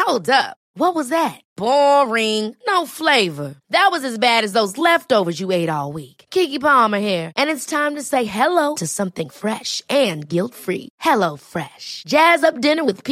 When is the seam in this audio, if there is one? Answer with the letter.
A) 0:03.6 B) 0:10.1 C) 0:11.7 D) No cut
D